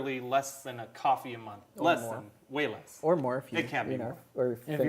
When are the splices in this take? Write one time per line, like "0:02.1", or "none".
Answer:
0:02.3